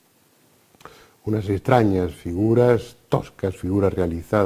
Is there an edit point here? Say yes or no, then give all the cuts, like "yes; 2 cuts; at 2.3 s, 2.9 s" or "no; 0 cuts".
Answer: yes; 1 cut; at 1.9 s